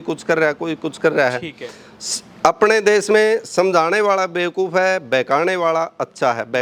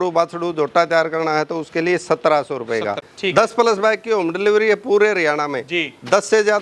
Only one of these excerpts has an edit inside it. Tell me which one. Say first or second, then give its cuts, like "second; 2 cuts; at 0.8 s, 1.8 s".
second; 1 cut; at 3.1 s